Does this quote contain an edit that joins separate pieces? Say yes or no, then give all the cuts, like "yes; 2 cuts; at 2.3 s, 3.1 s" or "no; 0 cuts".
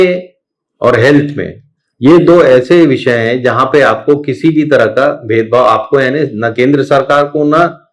no; 0 cuts